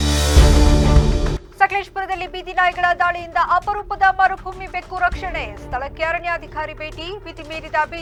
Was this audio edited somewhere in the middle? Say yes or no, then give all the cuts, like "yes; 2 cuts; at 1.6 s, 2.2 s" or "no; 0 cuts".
no; 0 cuts